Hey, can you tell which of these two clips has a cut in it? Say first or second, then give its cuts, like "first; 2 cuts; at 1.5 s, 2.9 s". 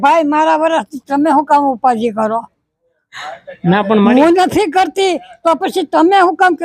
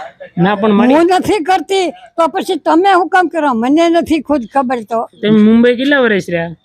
second; 1 cut; at 5.2 s